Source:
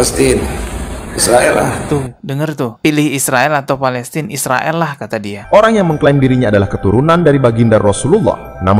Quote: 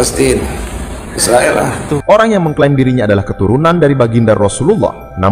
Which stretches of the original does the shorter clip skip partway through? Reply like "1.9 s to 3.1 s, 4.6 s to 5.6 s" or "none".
2.0 s to 5.5 s